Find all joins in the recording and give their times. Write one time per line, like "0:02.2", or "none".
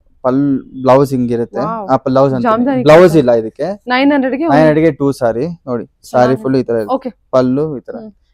none